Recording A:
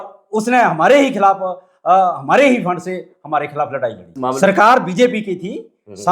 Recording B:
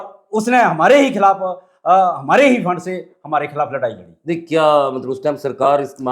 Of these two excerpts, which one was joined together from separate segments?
A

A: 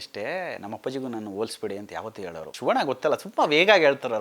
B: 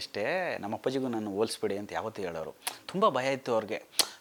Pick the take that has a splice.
A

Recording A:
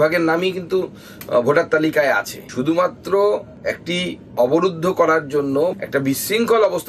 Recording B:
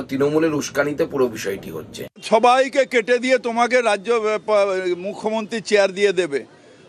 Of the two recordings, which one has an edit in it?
B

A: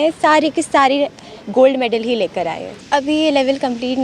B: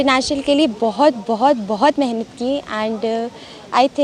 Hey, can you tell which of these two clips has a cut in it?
A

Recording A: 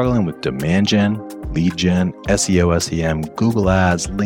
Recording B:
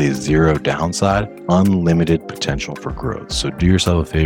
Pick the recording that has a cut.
B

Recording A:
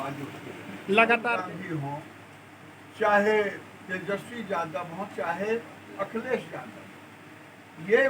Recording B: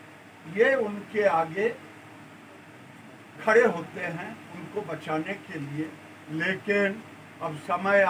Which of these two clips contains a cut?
A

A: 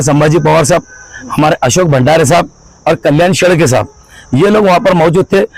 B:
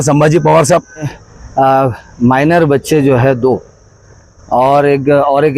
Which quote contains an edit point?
B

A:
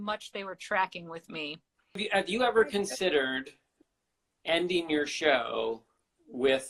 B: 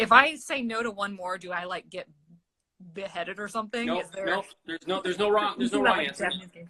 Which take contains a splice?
A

